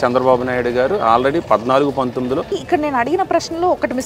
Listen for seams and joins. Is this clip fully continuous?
no; 1 cut; at 2.5 s

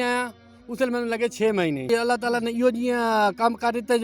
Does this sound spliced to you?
yes; 1 cut; at 1.9 s

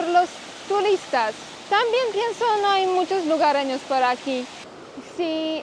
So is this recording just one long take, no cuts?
no; 2 cuts; at 1.5 s, 4.6 s

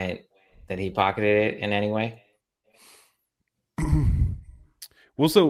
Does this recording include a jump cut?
no; 0 cuts

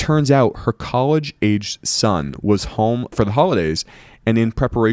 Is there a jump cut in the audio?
no; 0 cuts

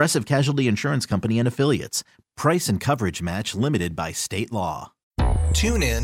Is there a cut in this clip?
yes; 1 cut; at 5.0 s

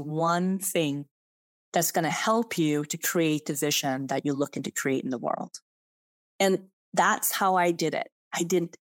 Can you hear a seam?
no; 0 cuts

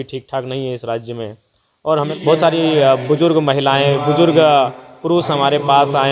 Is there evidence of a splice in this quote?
yes; 1 cut; at 2.1 s

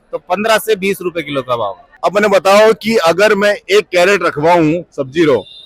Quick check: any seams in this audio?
yes; 1 cut; at 1.8 s

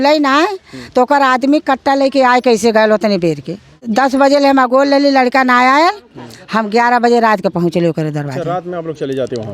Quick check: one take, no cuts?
no; 1 cut; at 3.8 s

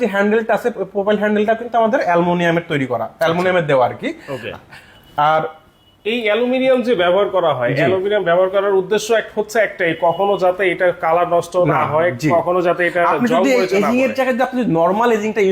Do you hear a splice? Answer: no; 0 cuts

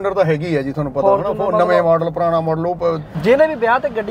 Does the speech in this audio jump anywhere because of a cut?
yes; 1 cut; at 3.1 s

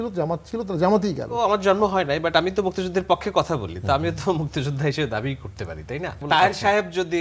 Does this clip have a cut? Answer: yes; 2 cuts; at 1.4 s, 6.2 s

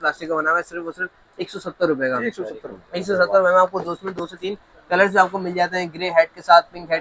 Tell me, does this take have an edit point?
no; 0 cuts

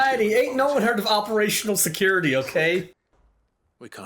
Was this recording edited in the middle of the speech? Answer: yes; 1 cut; at 2.9 s

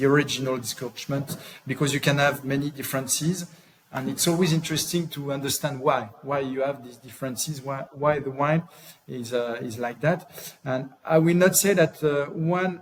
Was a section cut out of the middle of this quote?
no; 0 cuts

